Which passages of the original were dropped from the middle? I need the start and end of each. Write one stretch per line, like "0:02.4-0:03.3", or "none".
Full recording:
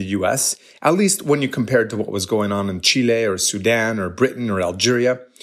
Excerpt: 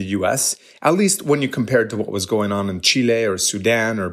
none